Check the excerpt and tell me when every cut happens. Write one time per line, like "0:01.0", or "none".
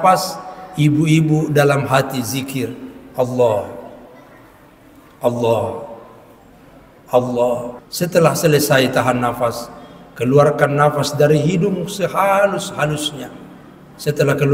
0:07.8

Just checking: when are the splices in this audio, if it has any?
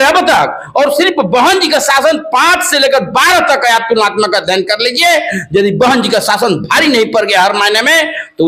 none

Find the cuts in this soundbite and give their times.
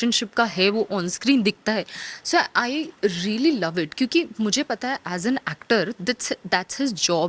none

